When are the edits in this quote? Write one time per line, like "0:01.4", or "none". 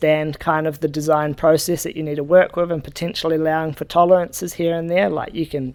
none